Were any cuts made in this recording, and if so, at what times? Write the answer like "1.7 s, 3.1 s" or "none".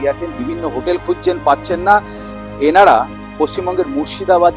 none